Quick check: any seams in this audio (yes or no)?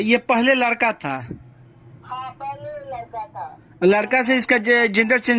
no